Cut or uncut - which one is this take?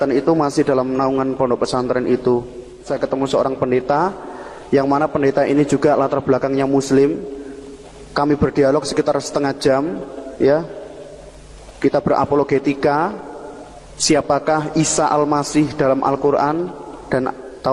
cut